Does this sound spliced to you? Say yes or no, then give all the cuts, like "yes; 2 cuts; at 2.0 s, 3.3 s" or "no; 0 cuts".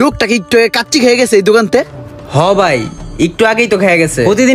no; 0 cuts